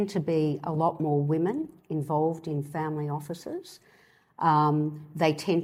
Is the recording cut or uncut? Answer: uncut